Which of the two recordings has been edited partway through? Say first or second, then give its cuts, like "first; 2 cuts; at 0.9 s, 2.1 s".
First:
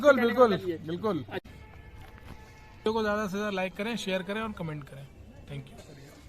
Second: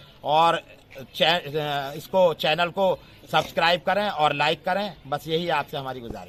first; 1 cut; at 1.4 s